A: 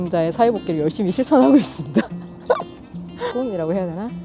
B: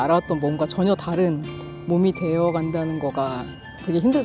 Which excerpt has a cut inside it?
A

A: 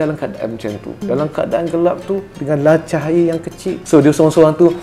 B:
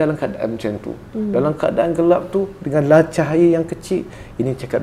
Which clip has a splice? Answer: A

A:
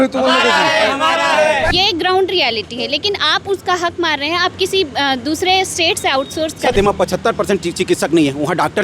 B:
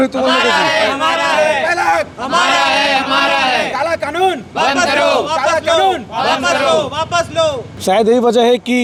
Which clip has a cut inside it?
A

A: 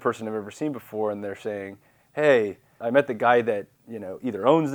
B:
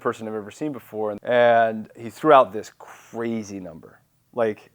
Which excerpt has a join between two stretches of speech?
B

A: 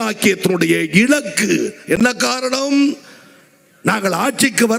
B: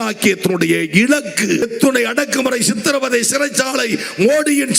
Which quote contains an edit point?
B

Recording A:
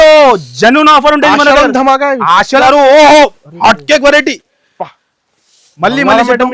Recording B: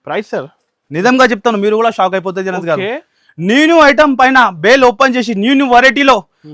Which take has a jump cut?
A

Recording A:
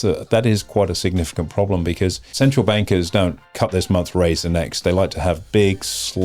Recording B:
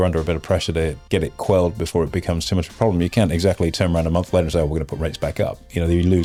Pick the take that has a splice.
A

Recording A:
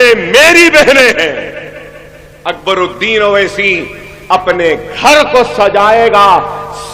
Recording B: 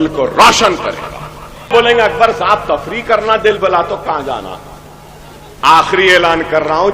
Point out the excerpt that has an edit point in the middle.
B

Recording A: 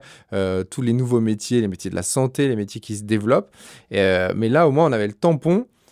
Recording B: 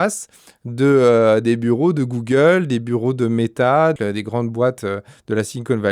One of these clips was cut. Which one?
B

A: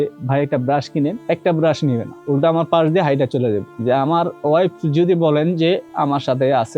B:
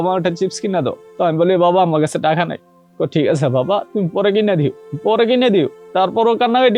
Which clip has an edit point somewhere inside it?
A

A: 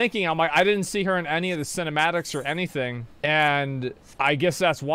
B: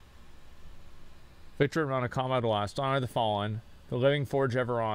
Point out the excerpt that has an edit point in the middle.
A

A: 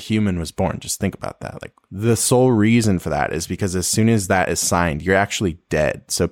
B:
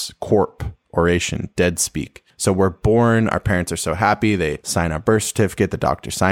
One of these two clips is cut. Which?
B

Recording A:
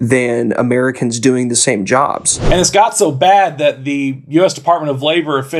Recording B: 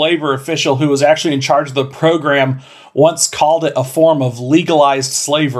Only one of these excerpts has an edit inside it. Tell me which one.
A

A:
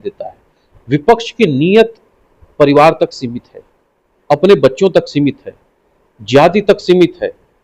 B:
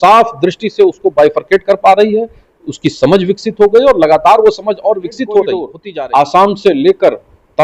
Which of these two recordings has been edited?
B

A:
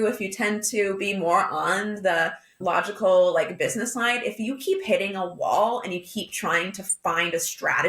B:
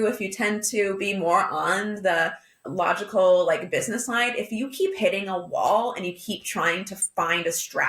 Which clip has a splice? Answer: A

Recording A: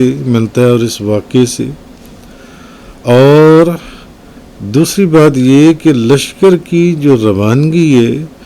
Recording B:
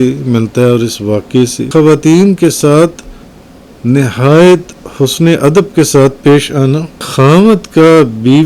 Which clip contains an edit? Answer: B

